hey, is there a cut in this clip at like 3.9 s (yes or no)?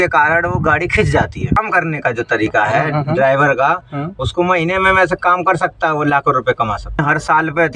no